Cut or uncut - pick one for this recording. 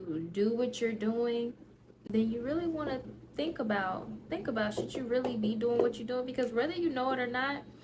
uncut